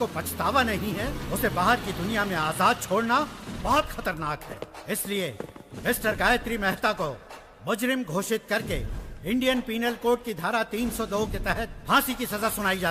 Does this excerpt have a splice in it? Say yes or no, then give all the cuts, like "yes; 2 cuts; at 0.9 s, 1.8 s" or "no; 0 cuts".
no; 0 cuts